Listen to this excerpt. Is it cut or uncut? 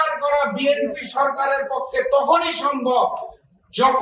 uncut